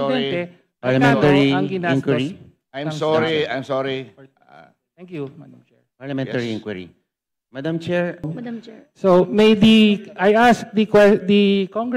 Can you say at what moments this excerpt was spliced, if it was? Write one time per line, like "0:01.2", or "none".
0:08.4